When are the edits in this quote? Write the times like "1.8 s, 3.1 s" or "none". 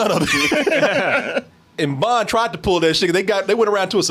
1.5 s